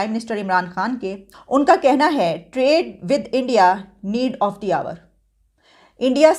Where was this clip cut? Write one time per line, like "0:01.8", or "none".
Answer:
0:01.3